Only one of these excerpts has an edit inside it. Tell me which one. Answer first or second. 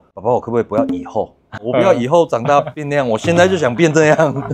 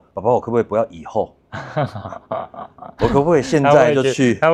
first